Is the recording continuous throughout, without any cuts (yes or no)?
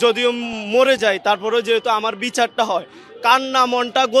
yes